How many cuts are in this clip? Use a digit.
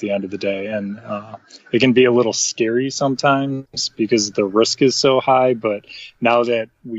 0